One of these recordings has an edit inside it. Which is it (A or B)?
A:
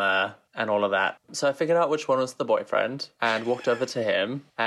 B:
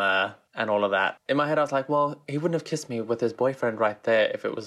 A